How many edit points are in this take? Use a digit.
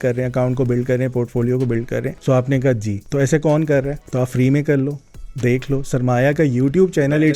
3